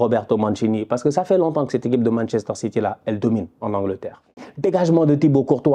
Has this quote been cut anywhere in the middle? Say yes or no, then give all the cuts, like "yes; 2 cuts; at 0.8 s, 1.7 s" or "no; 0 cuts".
yes; 1 cut; at 4.5 s